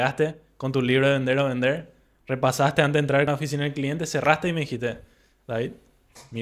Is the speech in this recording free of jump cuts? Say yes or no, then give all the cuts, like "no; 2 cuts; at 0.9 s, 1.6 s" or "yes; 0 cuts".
no; 1 cut; at 3.3 s